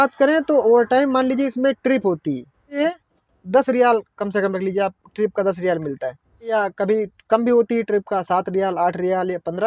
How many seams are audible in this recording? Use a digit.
2